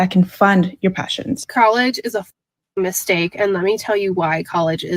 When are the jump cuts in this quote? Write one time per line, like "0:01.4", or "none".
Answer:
0:01.4